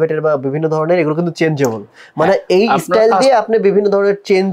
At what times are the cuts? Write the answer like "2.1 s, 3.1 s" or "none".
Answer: none

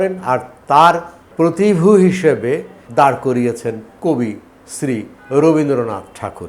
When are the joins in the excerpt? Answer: 1.2 s, 2.8 s, 3.9 s

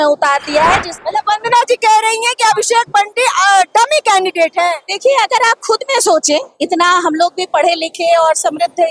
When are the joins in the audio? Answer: 1.0 s

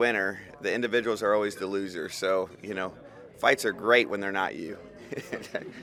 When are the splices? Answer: none

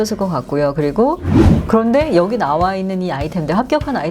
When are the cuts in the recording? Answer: 1.4 s

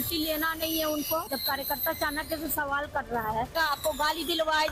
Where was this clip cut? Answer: none

